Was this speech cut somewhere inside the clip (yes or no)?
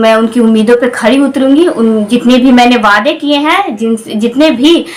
no